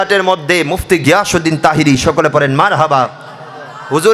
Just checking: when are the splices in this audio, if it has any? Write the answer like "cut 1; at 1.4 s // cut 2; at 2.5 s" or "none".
none